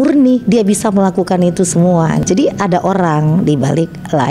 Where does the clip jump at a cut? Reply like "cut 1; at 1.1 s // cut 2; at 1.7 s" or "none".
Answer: cut 1; at 2.2 s